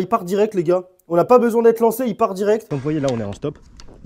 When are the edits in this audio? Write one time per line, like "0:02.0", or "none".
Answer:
0:02.7